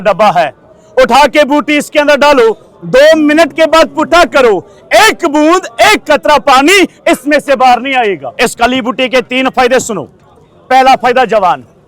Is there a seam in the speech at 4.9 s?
no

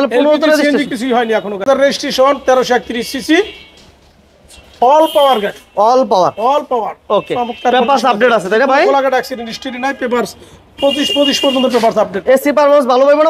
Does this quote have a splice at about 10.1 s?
no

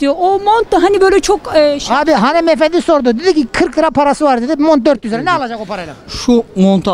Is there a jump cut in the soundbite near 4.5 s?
no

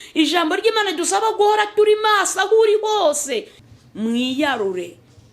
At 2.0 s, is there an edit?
no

